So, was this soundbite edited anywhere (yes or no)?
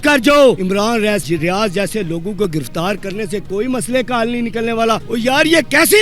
yes